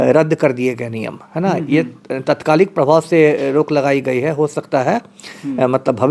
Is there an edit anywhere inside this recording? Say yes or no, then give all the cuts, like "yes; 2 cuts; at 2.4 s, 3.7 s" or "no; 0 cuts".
no; 0 cuts